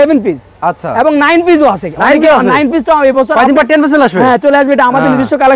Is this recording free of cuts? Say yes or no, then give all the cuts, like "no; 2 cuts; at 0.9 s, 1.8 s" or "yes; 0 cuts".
yes; 0 cuts